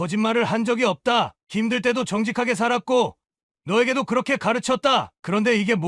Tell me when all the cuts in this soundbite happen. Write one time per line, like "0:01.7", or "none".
none